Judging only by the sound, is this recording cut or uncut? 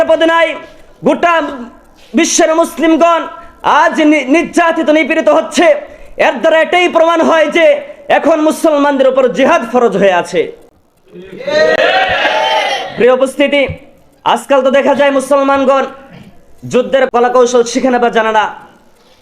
cut